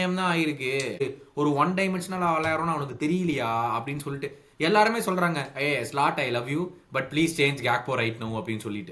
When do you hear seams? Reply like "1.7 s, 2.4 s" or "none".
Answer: 1.0 s